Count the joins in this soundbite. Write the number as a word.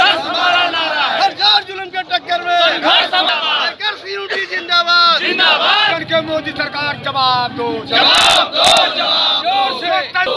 one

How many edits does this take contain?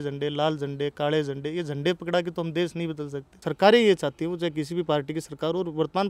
one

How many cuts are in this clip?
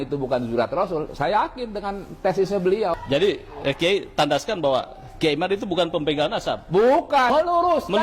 two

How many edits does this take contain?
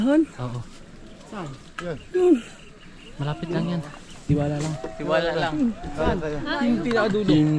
zero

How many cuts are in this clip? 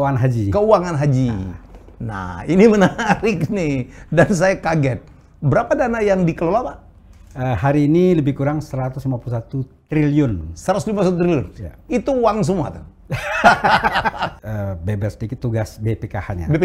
one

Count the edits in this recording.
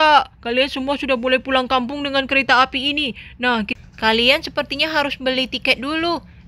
one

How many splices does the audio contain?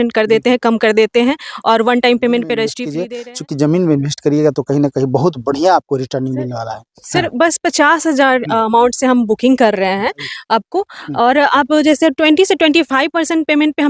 one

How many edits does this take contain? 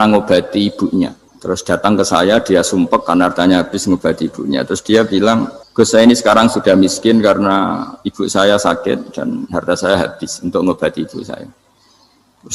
two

